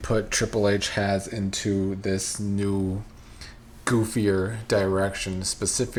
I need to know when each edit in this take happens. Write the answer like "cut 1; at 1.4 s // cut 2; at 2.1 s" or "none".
none